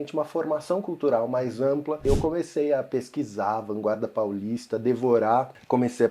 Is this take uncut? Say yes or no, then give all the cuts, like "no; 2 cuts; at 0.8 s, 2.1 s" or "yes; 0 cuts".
no; 1 cut; at 2.0 s